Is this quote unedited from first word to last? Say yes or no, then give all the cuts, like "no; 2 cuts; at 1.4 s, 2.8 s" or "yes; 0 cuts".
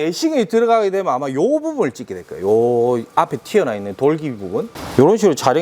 no; 1 cut; at 4.7 s